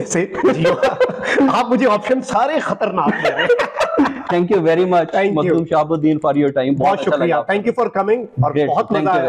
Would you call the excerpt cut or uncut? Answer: uncut